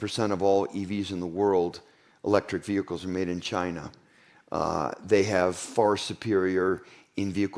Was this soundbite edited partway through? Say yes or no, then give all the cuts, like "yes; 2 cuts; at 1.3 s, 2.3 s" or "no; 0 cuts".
no; 0 cuts